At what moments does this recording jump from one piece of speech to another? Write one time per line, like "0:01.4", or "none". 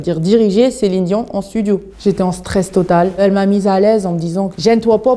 0:01.9
0:03.1